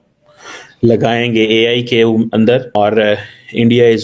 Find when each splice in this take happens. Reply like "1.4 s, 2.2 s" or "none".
2.8 s